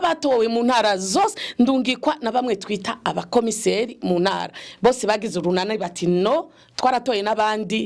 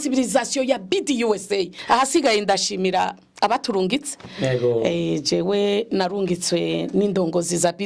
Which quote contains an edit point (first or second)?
second